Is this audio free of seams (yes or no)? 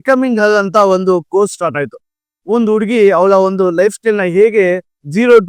yes